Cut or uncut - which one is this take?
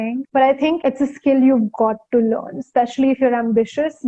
uncut